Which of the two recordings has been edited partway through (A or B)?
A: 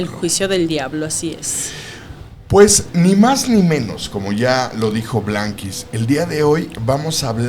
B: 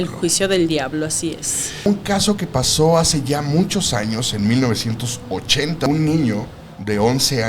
B